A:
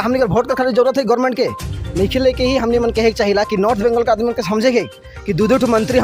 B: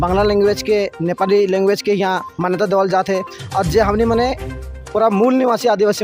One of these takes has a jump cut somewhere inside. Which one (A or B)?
A